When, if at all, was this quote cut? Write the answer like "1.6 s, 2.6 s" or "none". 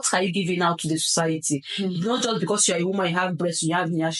none